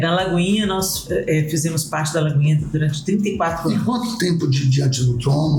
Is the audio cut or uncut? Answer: uncut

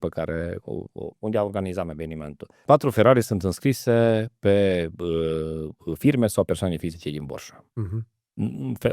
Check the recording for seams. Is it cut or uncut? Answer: cut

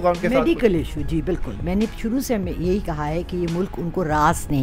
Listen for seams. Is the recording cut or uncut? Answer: uncut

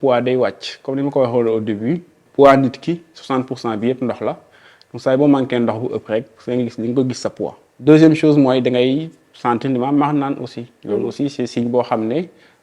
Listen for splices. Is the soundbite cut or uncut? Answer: cut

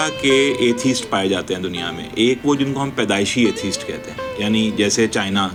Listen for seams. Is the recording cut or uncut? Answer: uncut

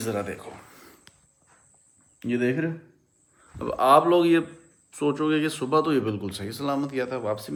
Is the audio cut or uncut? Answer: uncut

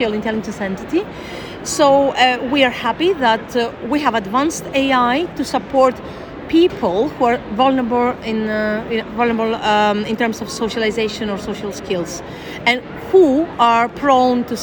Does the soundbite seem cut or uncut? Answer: uncut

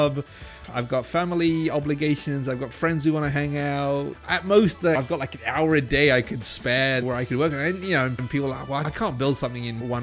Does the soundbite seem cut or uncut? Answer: cut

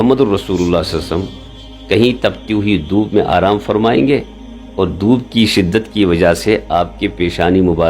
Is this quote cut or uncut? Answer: uncut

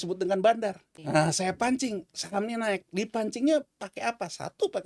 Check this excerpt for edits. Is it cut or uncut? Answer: cut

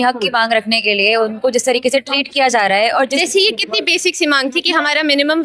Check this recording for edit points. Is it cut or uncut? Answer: cut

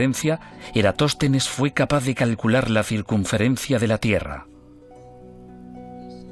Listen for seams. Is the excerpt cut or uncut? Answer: uncut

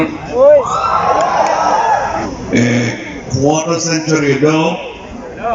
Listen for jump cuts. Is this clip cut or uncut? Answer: cut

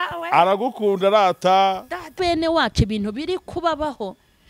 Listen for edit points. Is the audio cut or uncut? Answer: cut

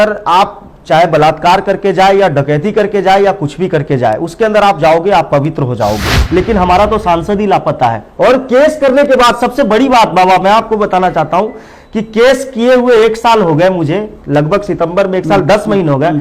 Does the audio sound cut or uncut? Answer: cut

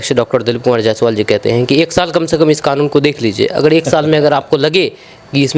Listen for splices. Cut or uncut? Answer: uncut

